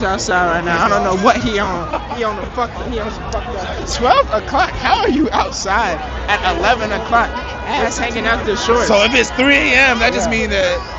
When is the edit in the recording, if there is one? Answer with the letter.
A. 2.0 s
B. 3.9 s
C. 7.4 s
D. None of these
B